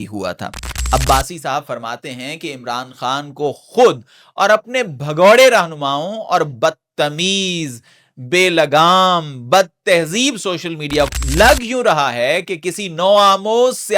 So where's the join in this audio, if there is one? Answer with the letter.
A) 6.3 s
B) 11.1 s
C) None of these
B